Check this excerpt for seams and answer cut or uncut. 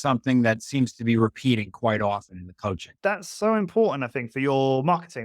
cut